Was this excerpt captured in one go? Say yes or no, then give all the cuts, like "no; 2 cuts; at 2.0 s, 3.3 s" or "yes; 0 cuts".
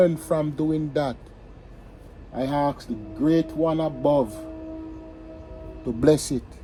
yes; 0 cuts